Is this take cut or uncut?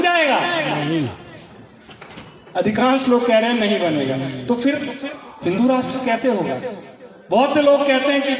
uncut